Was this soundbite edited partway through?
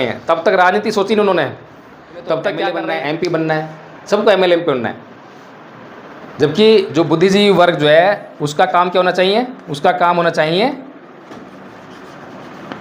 yes; 1 cut; at 2.8 s

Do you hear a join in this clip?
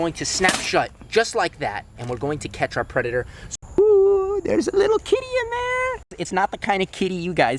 yes; 2 cuts; at 3.4 s, 6.0 s

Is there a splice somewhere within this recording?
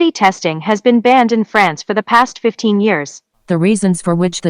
yes; 1 cut; at 3.3 s

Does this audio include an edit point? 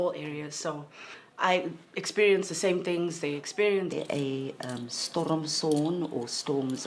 no; 0 cuts

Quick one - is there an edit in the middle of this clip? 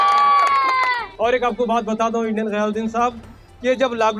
yes; 1 cut; at 1.0 s

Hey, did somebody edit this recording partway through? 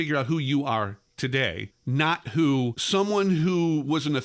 yes; 2 cuts; at 1.7 s, 2.8 s

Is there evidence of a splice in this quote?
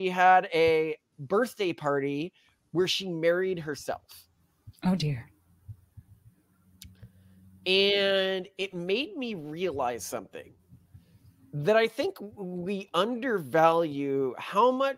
no; 0 cuts

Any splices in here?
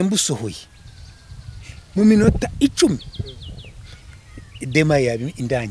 no; 0 cuts

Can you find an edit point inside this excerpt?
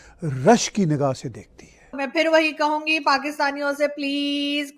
yes; 1 cut; at 2.0 s

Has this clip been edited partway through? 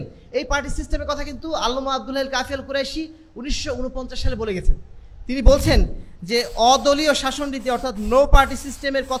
no; 0 cuts

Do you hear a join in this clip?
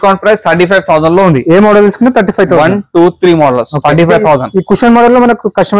no; 0 cuts

